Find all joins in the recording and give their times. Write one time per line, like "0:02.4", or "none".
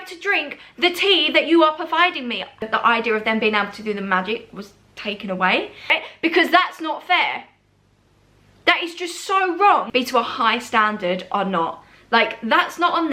0:02.7
0:06.1
0:09.9